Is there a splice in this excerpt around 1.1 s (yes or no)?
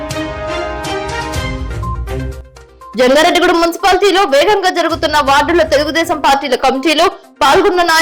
no